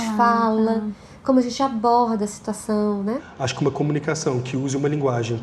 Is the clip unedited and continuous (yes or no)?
no